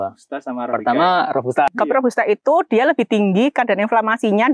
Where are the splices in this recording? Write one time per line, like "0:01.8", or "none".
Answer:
0:01.7

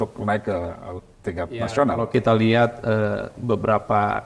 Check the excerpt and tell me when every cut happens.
none

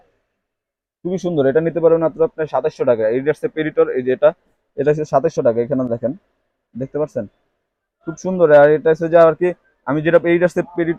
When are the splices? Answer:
none

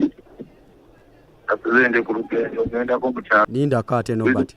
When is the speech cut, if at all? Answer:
0:03.5

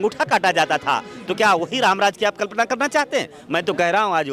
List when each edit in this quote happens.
none

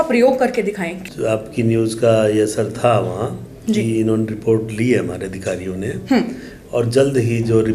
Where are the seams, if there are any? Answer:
0:00.9

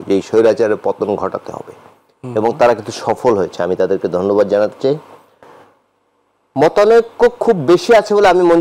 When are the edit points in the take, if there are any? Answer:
none

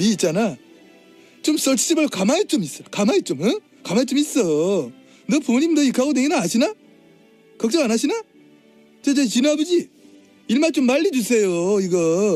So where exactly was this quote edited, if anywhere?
0:10.9

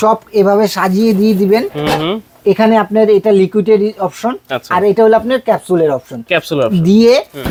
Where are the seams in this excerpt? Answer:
none

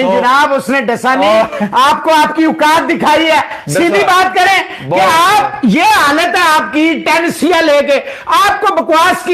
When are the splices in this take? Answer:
none

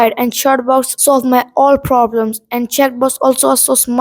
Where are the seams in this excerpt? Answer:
0:00.9

